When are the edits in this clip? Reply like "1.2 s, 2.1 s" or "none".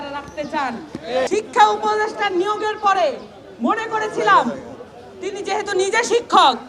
1.3 s